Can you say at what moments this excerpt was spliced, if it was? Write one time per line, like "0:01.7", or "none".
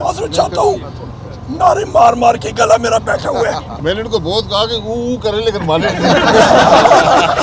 0:03.7